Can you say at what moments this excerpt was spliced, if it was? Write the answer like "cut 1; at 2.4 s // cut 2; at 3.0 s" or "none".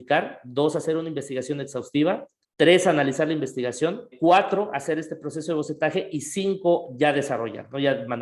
cut 1; at 2.4 s // cut 2; at 4.1 s